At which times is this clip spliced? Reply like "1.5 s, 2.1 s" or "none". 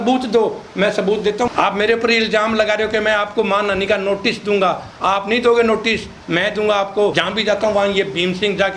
1.5 s, 7.2 s